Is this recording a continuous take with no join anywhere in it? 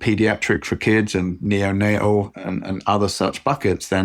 yes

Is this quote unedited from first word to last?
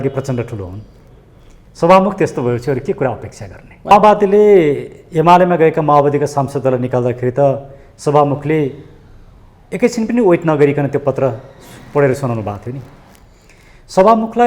no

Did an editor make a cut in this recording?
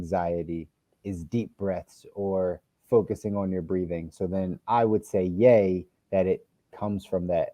no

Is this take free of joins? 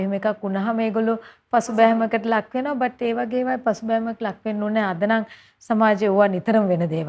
yes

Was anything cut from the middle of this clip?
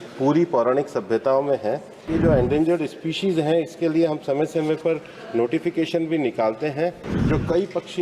yes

